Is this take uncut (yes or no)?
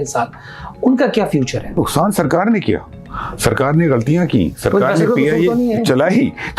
no